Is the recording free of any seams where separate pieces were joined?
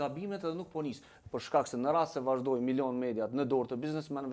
no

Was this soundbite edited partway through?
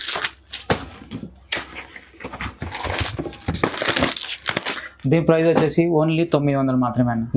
no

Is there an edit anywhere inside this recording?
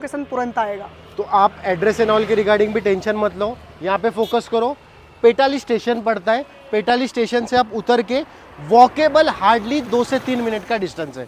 no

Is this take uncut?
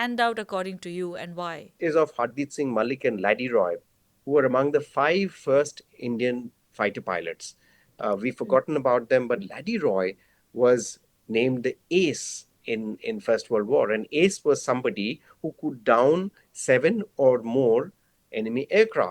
no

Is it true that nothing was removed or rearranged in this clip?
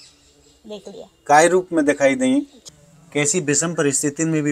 no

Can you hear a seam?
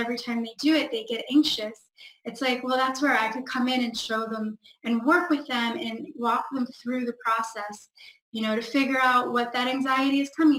no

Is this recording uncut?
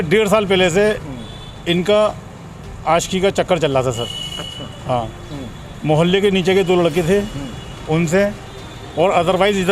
yes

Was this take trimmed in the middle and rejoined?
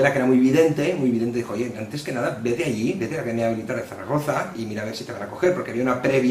no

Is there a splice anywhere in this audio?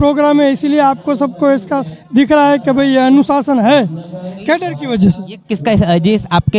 no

